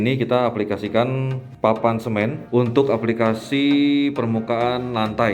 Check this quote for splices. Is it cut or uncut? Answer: cut